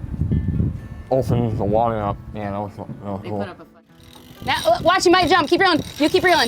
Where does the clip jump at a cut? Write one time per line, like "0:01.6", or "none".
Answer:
0:03.9